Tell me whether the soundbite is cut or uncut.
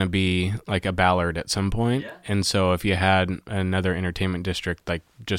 uncut